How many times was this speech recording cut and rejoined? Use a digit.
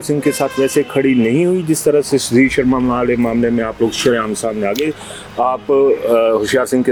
0